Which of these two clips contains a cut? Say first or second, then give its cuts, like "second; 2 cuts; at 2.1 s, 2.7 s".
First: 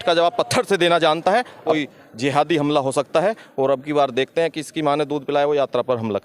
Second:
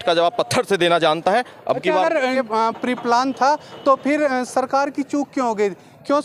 first; 1 cut; at 1.7 s